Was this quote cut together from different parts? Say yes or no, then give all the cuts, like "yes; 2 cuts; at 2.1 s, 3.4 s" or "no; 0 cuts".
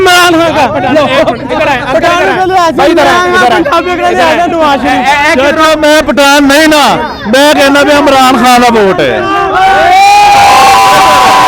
no; 0 cuts